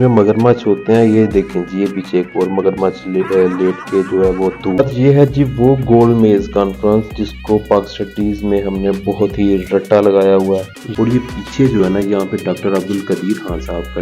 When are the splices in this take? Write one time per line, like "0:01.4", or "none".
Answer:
0:04.8
0:10.8